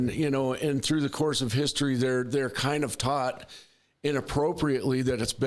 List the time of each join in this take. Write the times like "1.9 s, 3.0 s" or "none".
none